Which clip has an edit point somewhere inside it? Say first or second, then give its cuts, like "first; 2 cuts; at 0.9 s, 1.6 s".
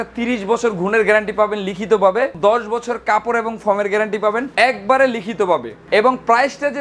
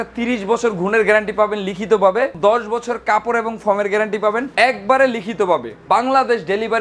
second; 1 cut; at 5.8 s